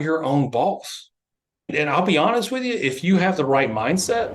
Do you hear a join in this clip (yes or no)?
yes